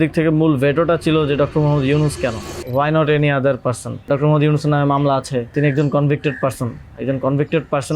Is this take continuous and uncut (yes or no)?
no